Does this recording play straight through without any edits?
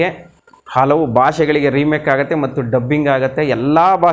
yes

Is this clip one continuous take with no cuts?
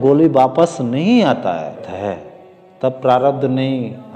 no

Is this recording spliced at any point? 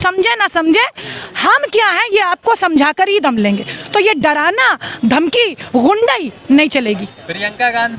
no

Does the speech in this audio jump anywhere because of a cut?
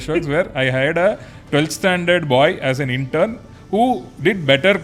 no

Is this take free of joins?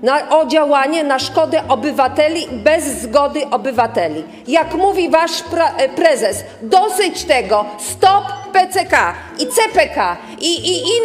yes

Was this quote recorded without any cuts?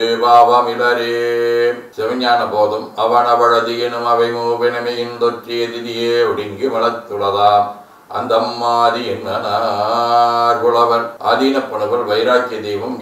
yes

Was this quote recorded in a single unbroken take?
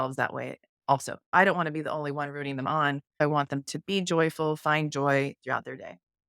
no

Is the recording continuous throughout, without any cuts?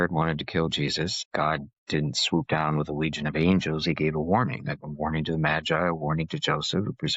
no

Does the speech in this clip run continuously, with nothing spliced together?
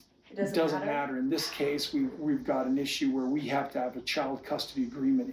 yes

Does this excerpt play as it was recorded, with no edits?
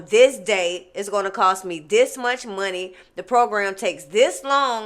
yes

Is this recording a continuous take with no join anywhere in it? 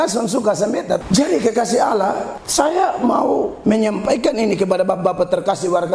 no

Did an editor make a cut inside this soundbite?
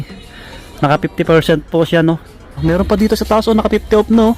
yes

